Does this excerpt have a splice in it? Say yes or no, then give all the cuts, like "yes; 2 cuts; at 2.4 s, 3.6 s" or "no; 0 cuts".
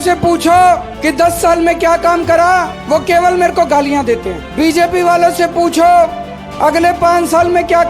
yes; 3 cuts; at 1.0 s, 2.7 s, 4.4 s